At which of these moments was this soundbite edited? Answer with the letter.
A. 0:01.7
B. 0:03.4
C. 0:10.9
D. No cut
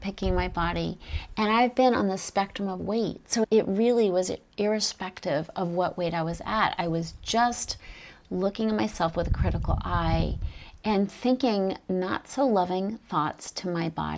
B